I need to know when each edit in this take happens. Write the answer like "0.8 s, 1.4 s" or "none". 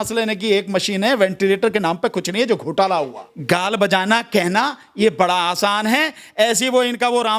3.3 s